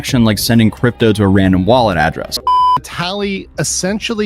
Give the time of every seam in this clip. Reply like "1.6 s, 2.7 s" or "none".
2.6 s